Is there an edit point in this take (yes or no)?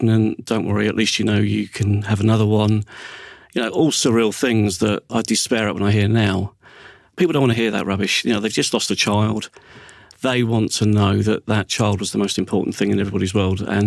yes